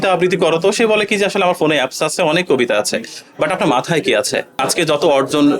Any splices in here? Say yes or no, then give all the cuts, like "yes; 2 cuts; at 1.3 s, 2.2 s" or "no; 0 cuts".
yes; 1 cut; at 4.6 s